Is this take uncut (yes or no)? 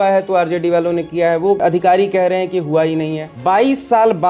no